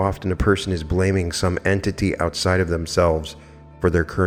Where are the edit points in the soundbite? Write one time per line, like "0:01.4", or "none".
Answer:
none